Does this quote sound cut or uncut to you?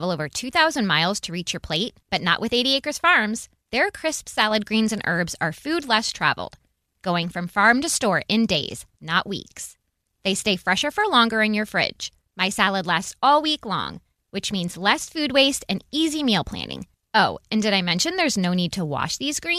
uncut